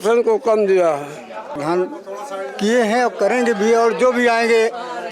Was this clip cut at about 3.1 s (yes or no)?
no